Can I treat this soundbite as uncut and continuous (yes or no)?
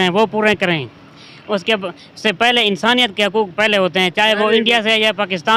yes